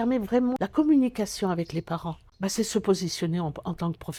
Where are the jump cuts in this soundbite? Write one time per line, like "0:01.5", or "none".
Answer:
none